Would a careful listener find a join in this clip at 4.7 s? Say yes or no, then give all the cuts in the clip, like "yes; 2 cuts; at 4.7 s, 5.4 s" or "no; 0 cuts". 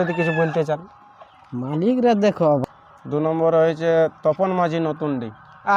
no; 1 cut; at 2.6 s